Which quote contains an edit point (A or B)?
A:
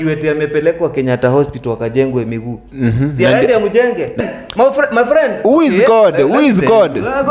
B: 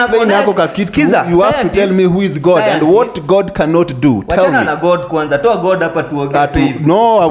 A